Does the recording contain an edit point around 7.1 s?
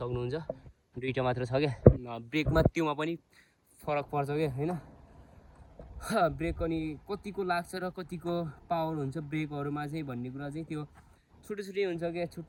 no; 0 cuts

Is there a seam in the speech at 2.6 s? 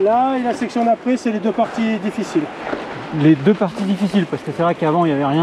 no; 0 cuts

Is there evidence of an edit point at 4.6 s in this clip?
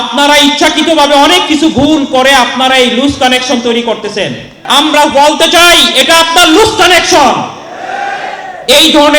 yes; 1 cut; at 4.6 s

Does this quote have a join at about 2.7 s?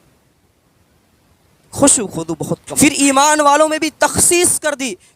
yes; 1 cut; at 2.7 s

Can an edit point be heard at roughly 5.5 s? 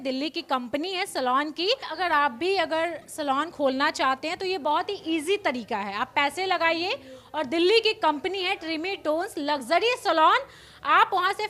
no; 1 cut; at 1.9 s

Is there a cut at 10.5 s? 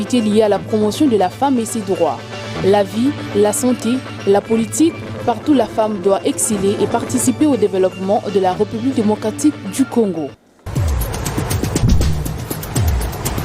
yes; 1 cut; at 10.5 s

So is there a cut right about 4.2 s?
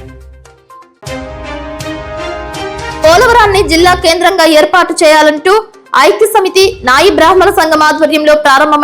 no; 2 cuts; at 0.9 s, 3.0 s

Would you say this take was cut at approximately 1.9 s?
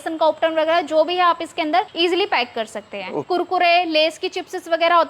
yes; 2 cuts; at 1.9 s, 3.1 s

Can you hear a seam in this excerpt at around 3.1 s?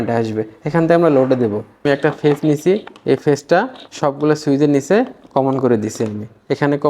no; 1 cut; at 1.8 s

